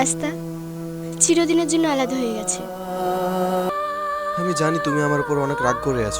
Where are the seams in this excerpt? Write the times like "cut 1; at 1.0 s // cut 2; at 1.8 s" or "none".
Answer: cut 1; at 3.7 s